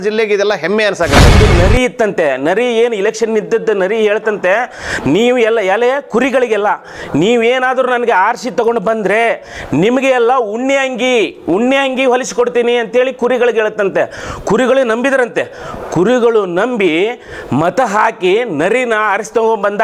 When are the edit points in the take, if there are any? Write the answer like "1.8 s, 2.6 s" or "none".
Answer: 1.3 s